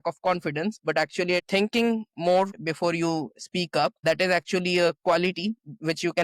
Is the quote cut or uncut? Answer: cut